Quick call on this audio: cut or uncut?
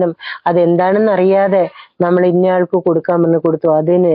uncut